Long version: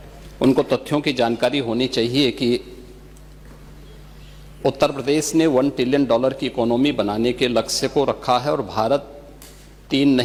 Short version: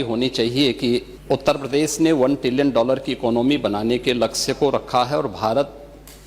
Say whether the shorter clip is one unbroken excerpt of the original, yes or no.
no